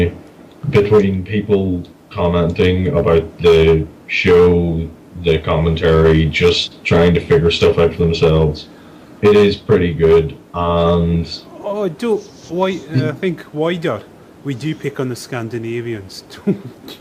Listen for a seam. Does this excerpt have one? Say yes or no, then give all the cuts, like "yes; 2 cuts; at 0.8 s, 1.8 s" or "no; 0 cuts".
no; 0 cuts